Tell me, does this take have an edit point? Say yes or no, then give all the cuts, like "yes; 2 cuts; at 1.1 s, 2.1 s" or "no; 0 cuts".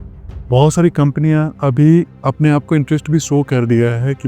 yes; 1 cut; at 2.2 s